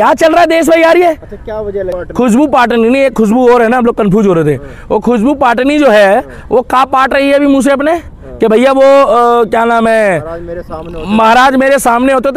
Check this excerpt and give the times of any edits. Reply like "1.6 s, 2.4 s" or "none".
2.0 s